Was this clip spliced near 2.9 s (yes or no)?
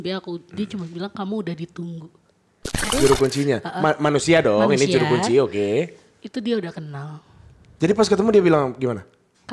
yes